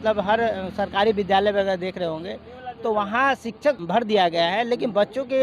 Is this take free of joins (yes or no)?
no